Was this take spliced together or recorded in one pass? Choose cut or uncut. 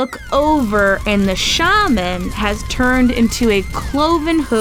uncut